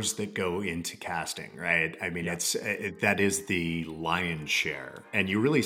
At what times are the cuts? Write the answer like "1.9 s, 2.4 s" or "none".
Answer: 3.9 s